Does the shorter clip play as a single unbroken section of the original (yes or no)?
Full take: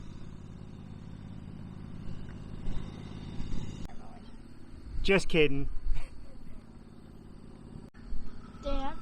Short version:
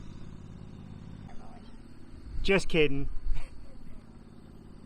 no